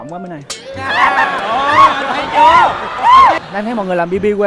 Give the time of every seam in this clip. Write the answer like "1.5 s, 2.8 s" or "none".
3.4 s